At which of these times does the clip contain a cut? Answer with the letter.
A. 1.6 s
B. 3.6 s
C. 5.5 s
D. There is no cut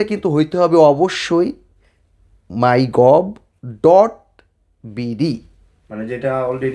D